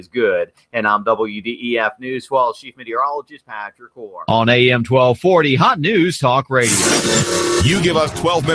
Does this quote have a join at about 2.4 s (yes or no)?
no